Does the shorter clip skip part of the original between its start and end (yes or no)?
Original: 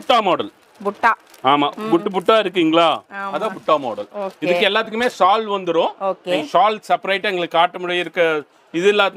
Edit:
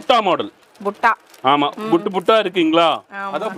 no